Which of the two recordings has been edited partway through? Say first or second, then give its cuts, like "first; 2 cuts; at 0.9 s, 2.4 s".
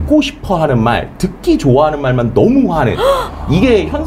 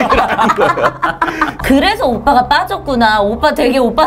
second; 1 cut; at 1.5 s